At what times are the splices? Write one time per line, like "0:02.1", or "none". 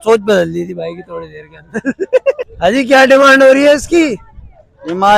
0:02.5